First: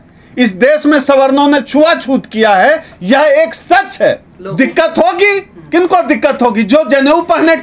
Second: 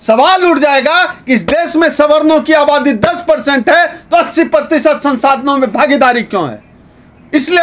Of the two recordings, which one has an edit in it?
first; 1 cut; at 4.3 s

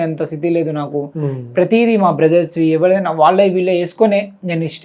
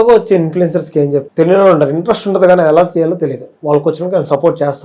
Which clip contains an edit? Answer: second; 1 cut; at 1.3 s

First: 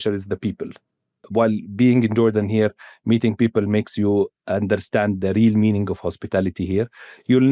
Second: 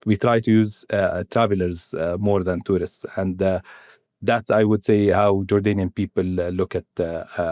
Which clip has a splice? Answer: first; 1 cut; at 1.2 s

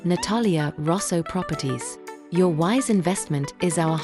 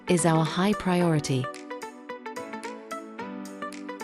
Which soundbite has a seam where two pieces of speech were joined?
second; 1 cut; at 1.4 s

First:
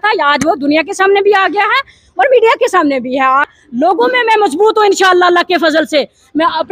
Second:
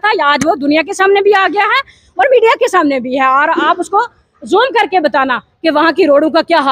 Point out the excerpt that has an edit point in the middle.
first; 1 cut; at 3.4 s

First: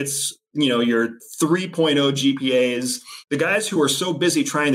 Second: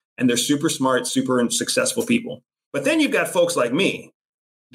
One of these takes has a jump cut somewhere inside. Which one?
first; 1 cut; at 1.2 s

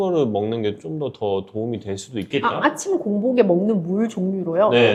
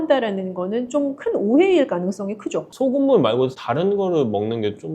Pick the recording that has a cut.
second; 1 cut; at 2.6 s

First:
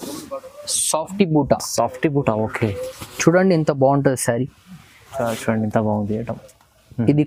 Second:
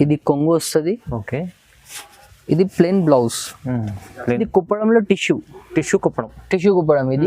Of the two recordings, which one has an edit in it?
second; 1 cut; at 4.4 s

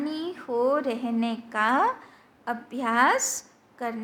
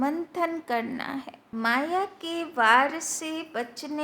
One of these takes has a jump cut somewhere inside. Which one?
second; 1 cut; at 1.4 s

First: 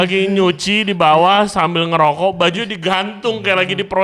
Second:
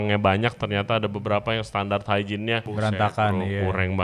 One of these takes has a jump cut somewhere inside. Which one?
second; 1 cut; at 2.7 s

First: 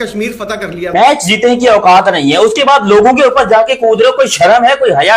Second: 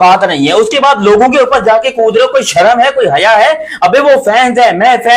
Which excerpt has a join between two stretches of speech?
first; 1 cut; at 0.9 s

